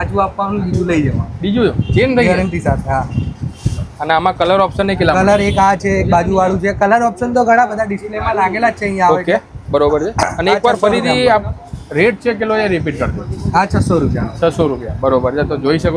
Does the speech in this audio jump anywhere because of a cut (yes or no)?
no